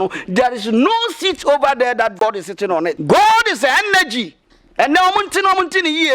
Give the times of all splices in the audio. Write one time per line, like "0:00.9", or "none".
0:03.0